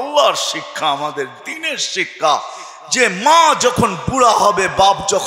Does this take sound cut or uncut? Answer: uncut